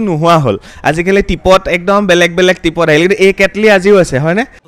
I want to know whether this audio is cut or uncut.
uncut